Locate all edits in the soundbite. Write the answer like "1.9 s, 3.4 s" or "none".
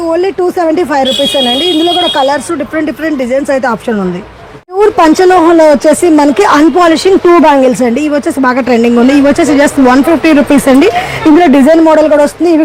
none